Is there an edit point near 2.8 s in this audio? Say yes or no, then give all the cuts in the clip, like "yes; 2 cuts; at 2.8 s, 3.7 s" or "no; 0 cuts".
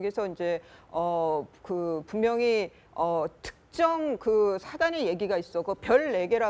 yes; 1 cut; at 2.8 s